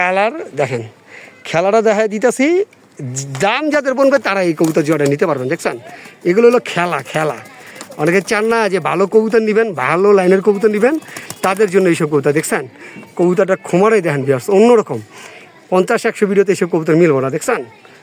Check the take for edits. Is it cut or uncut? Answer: uncut